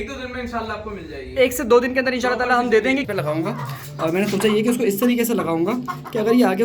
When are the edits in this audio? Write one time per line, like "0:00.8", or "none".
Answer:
0:03.1